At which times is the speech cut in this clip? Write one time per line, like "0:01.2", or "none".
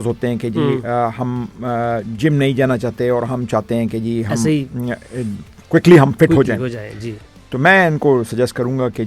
none